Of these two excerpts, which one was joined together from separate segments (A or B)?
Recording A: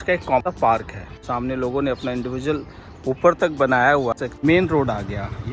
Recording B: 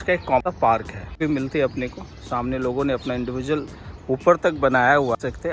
A